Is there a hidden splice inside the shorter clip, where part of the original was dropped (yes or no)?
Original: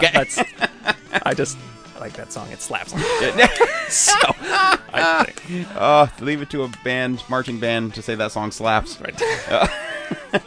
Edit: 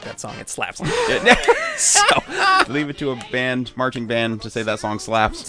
yes